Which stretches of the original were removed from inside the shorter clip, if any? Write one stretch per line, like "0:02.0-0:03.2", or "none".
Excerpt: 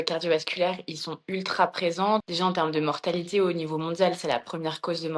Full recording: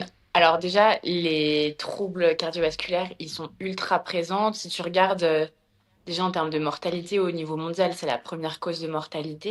0:04.6-0:06.1